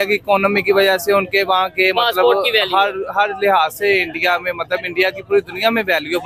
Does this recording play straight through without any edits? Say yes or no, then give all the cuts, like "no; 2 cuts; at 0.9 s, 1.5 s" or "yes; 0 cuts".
yes; 0 cuts